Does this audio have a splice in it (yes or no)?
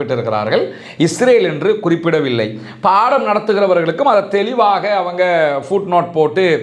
no